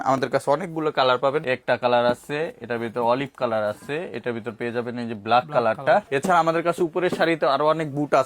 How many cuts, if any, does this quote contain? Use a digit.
2